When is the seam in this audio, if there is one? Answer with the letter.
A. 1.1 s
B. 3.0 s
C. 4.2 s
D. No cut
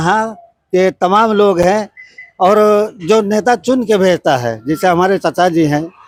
D